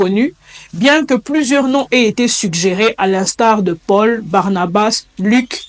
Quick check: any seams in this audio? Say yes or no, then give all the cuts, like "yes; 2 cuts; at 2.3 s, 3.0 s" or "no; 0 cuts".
no; 0 cuts